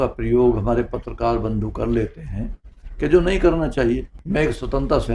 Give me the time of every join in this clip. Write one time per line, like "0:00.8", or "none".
0:04.1